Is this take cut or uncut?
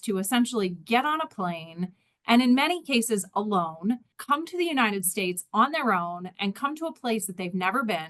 cut